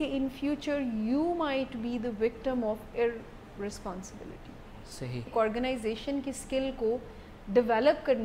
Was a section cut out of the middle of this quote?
yes; 1 cut; at 5.3 s

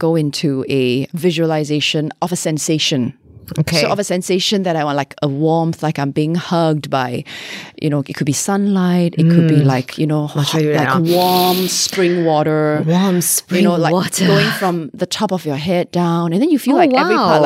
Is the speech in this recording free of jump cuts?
no; 2 cuts; at 1.1 s, 2.1 s

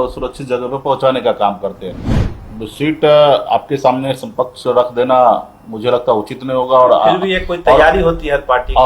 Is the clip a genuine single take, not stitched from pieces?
no; 1 cut; at 2.3 s

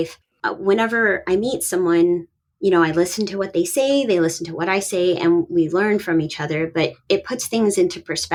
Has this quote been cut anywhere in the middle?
no; 0 cuts

